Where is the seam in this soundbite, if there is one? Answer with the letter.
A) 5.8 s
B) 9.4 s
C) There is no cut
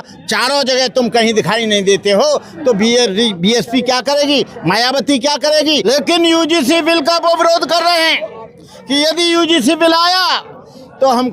A